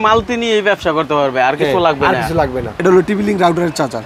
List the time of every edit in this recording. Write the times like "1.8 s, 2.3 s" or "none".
2.7 s